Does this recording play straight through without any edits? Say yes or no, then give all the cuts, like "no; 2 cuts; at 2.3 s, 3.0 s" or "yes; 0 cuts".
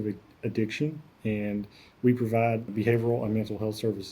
no; 1 cut; at 2.7 s